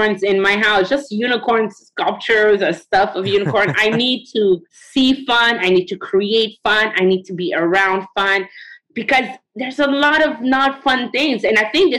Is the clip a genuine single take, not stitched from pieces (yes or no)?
no